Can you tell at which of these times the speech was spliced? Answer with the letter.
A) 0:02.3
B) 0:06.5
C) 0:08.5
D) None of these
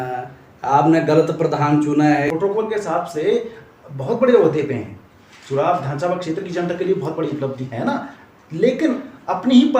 A